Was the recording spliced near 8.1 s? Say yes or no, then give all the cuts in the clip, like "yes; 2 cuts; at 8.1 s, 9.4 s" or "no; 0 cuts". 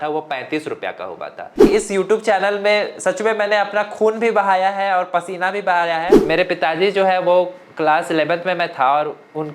no; 2 cuts; at 1.6 s, 6.2 s